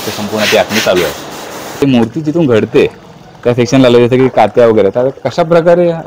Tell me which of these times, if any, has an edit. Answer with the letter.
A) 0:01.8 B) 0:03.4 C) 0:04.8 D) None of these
A